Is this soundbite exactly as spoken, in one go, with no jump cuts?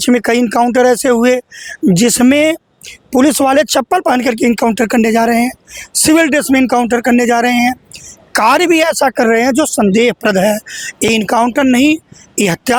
yes; 0 cuts

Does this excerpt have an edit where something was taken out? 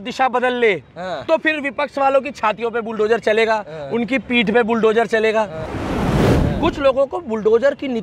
yes; 1 cut; at 6.2 s

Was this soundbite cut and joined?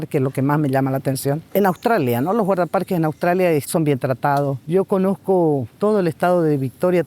yes; 4 cuts; at 1.4 s, 3.7 s, 4.6 s, 5.7 s

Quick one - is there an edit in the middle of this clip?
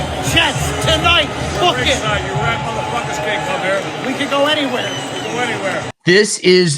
no; 0 cuts

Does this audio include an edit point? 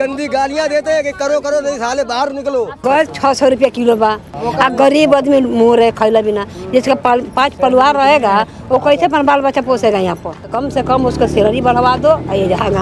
yes; 3 cuts; at 2.8 s, 4.3 s, 10.5 s

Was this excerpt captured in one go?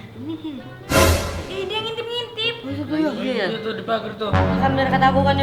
yes; 0 cuts

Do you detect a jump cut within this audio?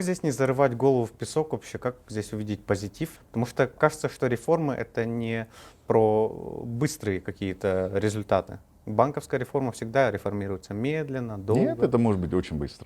no; 0 cuts

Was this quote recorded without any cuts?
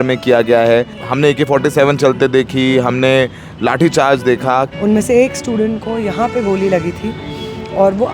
no; 2 cuts; at 1.0 s, 4.7 s

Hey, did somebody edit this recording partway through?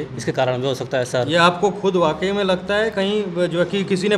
no; 0 cuts

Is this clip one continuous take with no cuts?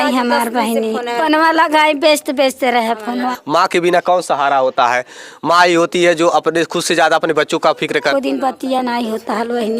no; 3 cuts; at 1.2 s, 3.3 s, 8.1 s

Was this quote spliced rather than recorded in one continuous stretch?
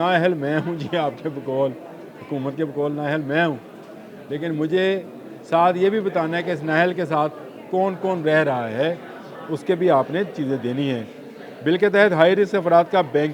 no; 0 cuts

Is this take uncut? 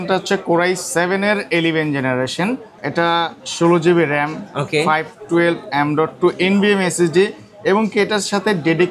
yes; 0 cuts

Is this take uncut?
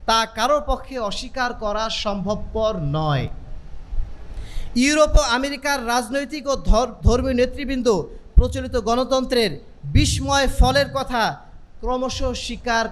yes; 0 cuts

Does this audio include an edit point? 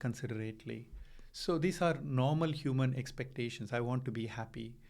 no; 0 cuts

